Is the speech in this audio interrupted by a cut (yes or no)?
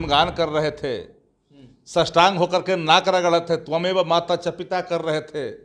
no